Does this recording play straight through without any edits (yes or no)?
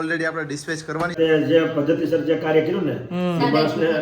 no